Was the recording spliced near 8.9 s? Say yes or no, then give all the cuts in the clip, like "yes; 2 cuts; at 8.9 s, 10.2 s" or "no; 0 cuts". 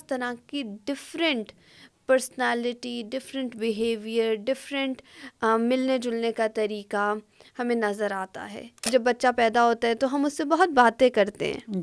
yes; 1 cut; at 8.9 s